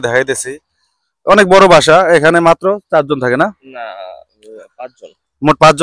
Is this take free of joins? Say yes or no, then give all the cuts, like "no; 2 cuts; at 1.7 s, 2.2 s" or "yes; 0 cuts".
yes; 0 cuts